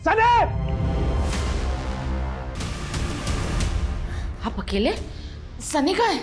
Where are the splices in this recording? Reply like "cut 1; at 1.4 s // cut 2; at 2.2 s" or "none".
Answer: cut 1; at 2.5 s